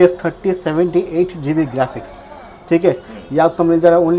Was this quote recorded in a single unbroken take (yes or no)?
yes